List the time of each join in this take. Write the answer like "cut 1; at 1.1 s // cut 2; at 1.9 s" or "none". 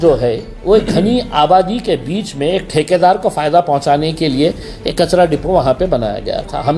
none